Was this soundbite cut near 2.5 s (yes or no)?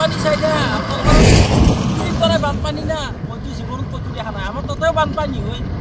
no